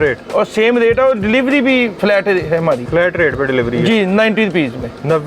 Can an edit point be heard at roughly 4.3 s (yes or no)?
no